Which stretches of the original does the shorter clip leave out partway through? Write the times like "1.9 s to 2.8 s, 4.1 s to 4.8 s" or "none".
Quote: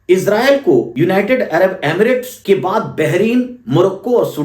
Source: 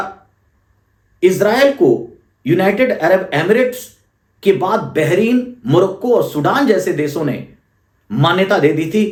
2.0 s to 2.4 s, 3.8 s to 4.3 s